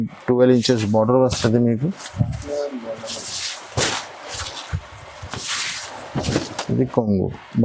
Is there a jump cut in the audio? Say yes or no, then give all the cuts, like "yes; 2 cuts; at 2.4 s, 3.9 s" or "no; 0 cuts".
no; 0 cuts